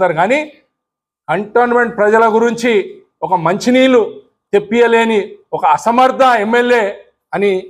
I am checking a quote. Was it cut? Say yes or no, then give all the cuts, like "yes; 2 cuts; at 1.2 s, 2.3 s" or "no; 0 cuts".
no; 0 cuts